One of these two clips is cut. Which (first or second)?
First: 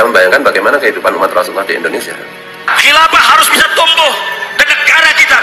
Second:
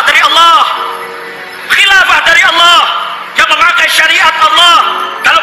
first